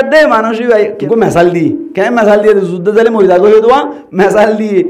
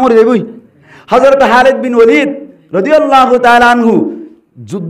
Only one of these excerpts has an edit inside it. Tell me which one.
first; 1 cut; at 1.0 s

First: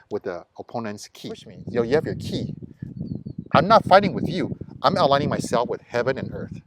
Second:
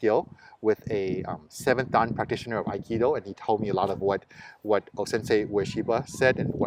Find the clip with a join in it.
first; 1 cut; at 1.5 s

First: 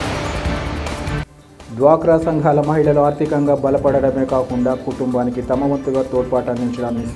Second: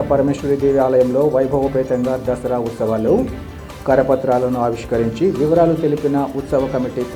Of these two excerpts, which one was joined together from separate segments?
first; 1 cut; at 1.2 s

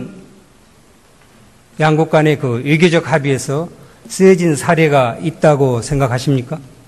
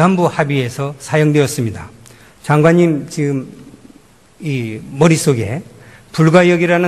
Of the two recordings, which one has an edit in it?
first; 1 cut; at 2.8 s

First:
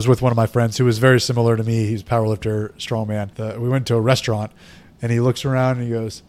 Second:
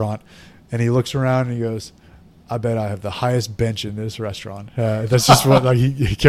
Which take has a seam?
first; 1 cut; at 3.3 s

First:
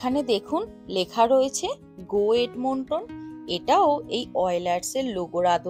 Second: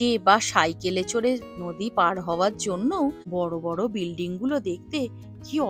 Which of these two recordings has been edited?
second; 1 cut; at 3.2 s

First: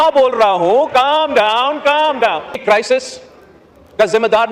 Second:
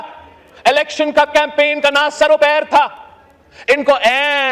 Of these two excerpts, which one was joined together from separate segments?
first; 1 cut; at 2.6 s

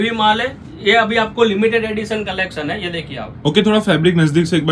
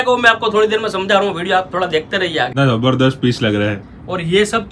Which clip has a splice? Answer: second; 1 cut; at 2.5 s

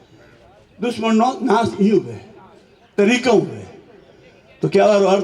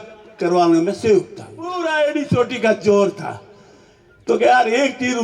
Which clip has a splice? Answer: second; 1 cut; at 1.8 s

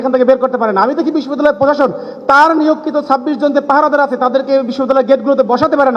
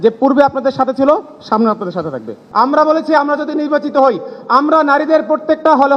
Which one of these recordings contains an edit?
second; 1 cut; at 2.4 s

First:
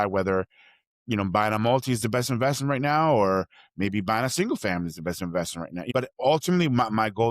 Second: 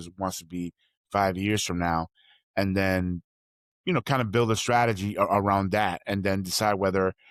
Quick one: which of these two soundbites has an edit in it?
first; 1 cut; at 5.9 s

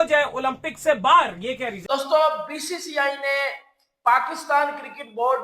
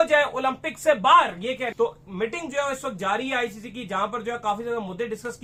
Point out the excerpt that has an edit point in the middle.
first; 1 cut; at 1.8 s

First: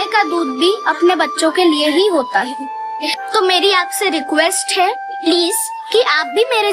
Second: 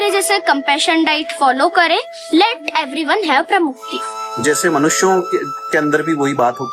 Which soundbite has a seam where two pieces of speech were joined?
second; 1 cut; at 4.4 s

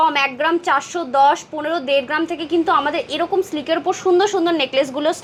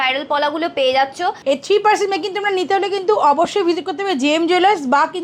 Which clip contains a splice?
second; 1 cut; at 1.4 s

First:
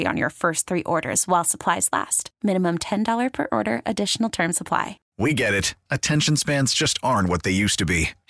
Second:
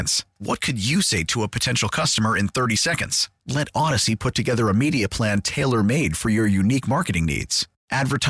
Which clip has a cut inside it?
first; 1 cut; at 5.0 s

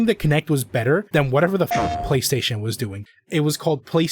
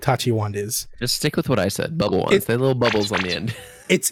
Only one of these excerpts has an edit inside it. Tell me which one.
first; 2 cuts; at 1.1 s, 3.1 s

